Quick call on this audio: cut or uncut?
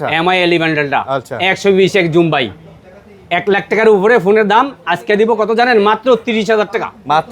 uncut